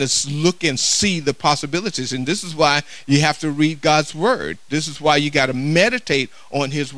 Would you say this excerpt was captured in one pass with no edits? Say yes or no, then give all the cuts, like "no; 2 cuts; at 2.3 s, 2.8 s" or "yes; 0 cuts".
yes; 0 cuts